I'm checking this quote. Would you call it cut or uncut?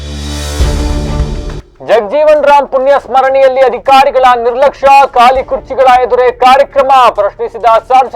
cut